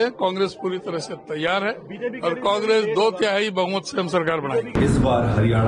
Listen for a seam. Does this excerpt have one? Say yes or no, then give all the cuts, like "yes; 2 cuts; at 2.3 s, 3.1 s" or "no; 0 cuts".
yes; 1 cut; at 4.7 s